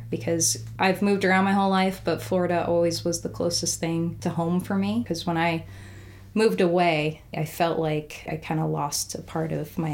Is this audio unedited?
no; 4 cuts; at 4.2 s, 5.0 s, 7.4 s, 8.3 s

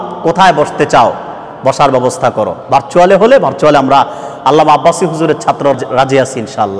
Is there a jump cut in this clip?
yes; 1 cut; at 5.8 s

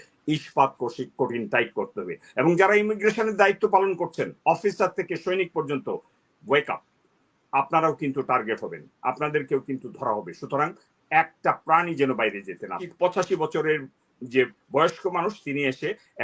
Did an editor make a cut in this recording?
yes; 1 cut; at 12.8 s

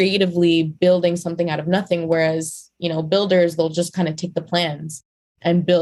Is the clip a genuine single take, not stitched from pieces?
yes; 0 cuts

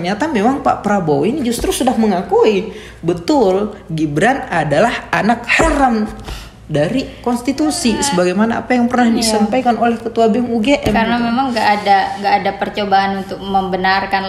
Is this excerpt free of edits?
yes; 0 cuts

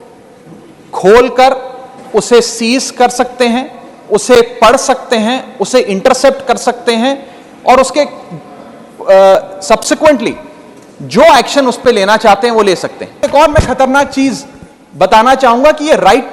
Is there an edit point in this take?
yes; 1 cut; at 13.2 s

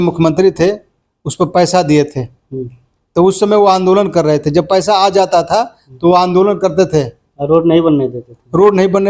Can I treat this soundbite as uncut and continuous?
yes; 0 cuts

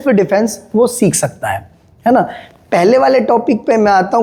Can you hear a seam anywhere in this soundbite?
no; 0 cuts

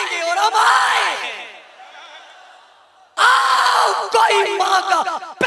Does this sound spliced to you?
yes; 1 cut; at 3.1 s

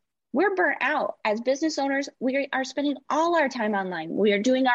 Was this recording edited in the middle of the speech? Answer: no; 0 cuts

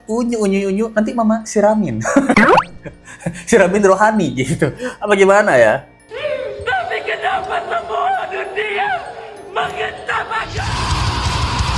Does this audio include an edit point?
no; 0 cuts

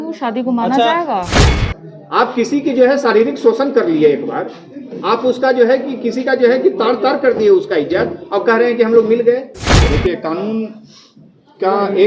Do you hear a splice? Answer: yes; 2 cuts; at 1.5 s, 9.8 s

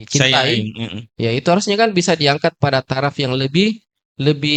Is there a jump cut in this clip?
no; 0 cuts

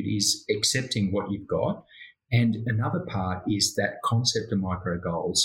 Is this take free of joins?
yes; 0 cuts

